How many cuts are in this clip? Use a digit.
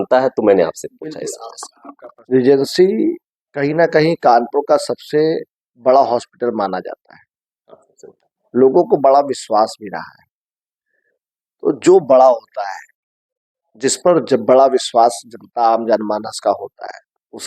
1